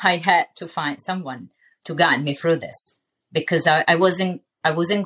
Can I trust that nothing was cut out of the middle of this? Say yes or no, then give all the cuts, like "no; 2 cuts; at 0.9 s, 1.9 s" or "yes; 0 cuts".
yes; 0 cuts